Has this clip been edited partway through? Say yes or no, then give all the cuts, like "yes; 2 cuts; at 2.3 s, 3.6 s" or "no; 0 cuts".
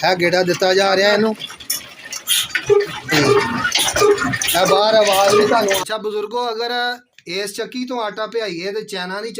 yes; 2 cuts; at 3.1 s, 5.8 s